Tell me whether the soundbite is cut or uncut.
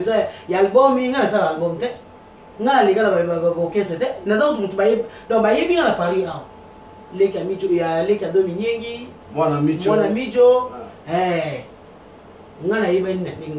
uncut